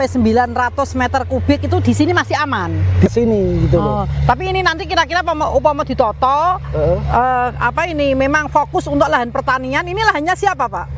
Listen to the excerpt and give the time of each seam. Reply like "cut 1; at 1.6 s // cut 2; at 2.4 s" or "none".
cut 1; at 3.1 s